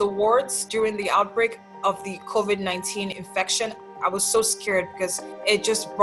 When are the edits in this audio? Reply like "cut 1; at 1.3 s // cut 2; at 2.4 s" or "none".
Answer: none